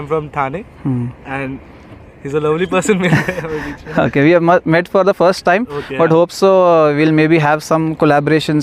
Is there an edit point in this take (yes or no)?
no